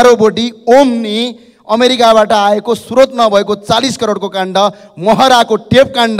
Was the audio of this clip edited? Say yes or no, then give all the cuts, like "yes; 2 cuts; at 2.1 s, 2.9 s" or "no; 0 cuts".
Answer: no; 0 cuts